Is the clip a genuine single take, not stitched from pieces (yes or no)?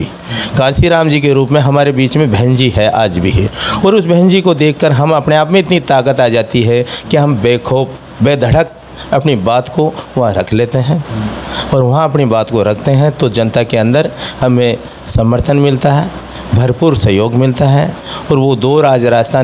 yes